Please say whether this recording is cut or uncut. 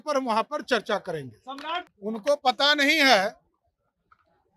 cut